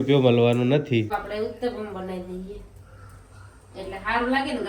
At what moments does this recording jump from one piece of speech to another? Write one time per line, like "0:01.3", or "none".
0:01.1